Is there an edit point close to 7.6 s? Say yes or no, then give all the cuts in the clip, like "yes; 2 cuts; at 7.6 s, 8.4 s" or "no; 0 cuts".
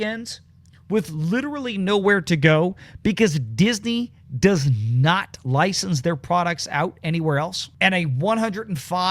yes; 1 cut; at 7.6 s